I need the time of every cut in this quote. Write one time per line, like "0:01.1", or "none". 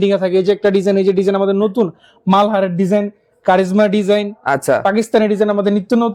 none